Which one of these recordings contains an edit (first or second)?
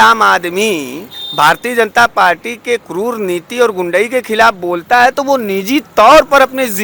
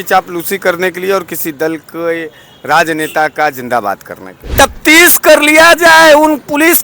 second